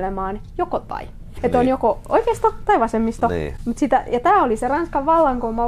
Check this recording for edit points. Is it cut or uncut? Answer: cut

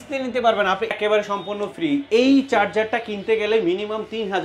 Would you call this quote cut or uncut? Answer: cut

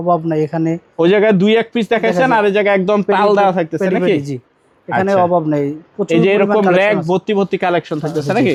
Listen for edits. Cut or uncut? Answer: uncut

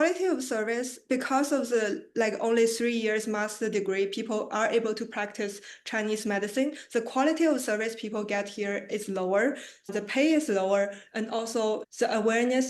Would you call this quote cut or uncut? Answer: uncut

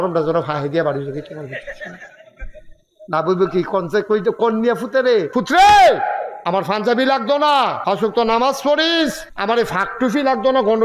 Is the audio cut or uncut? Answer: cut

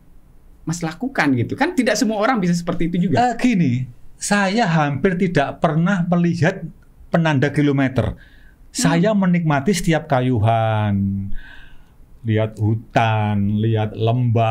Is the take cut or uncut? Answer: uncut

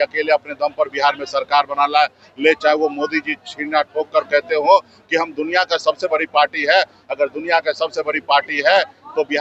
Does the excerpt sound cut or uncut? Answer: uncut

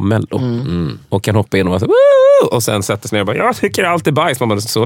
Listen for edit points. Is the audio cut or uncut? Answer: uncut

